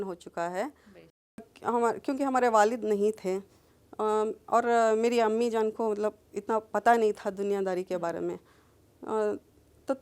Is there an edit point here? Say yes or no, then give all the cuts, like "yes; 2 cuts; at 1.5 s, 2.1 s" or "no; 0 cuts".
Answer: yes; 1 cut; at 1.5 s